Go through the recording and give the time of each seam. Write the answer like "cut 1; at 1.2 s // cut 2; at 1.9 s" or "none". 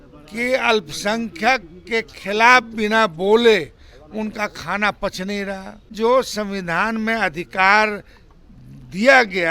cut 1; at 5.9 s